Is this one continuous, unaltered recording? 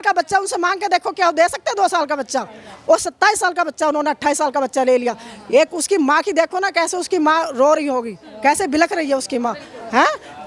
yes; 0 cuts

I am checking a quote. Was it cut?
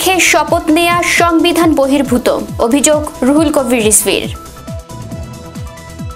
no; 0 cuts

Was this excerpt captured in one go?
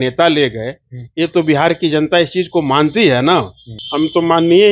no; 1 cut; at 3.8 s

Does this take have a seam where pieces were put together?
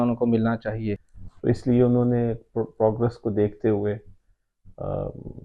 yes; 1 cut; at 1.1 s

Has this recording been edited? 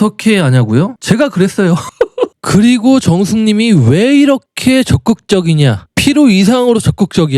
yes; 1 cut; at 2.3 s

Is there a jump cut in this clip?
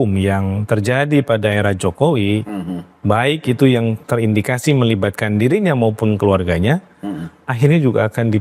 no; 0 cuts

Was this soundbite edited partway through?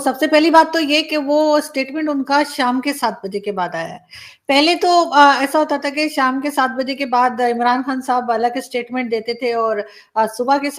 no; 0 cuts

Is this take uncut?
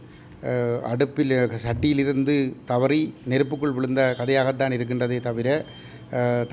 yes; 0 cuts

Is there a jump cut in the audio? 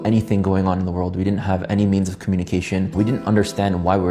yes; 1 cut; at 2.9 s

